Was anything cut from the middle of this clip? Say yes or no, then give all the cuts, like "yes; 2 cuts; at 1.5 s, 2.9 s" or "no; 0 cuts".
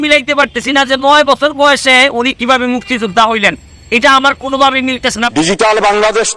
yes; 1 cut; at 5.2 s